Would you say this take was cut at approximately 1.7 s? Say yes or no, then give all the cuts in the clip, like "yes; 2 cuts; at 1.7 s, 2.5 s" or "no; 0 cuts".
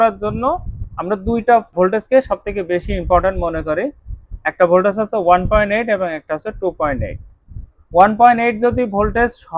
yes; 1 cut; at 1.7 s